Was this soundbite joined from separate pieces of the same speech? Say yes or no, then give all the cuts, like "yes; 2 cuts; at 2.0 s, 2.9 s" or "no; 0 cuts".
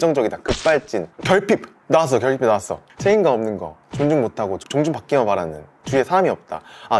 no; 0 cuts